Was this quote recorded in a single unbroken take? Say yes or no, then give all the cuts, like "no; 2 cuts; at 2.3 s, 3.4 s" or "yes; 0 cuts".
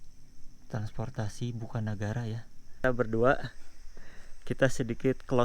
no; 1 cut; at 2.8 s